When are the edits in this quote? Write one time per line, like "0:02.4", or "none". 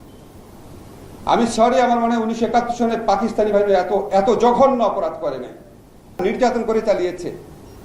0:06.2